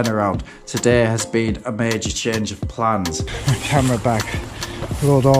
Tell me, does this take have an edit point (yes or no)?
yes